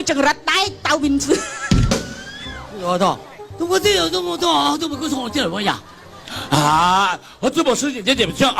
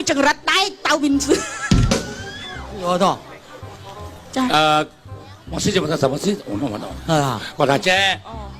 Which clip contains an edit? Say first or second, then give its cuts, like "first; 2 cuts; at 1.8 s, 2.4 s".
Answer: first; 1 cut; at 3.4 s